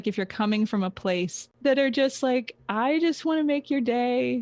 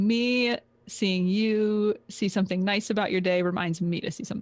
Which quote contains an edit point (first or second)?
first